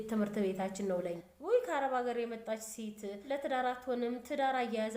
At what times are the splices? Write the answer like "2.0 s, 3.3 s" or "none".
1.3 s, 3.1 s